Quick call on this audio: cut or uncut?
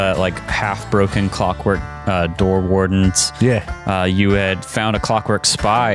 uncut